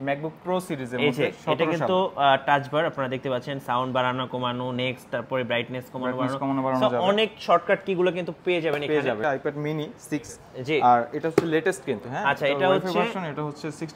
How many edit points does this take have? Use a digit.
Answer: 1